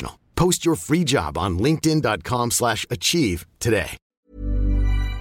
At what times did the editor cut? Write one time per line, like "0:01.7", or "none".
0:04.1